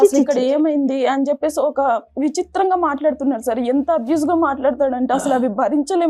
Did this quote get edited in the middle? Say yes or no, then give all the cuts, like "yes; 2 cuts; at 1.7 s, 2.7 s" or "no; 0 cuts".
no; 0 cuts